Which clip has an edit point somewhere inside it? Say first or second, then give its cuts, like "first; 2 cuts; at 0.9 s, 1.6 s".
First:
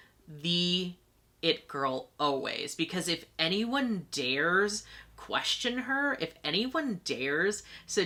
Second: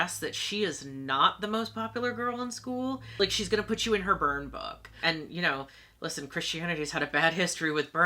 second; 2 cuts; at 3.1 s, 5.0 s